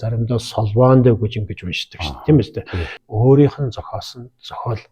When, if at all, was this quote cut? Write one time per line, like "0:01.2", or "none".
0:03.0